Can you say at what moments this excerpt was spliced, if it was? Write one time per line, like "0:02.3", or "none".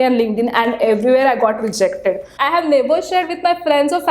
0:02.4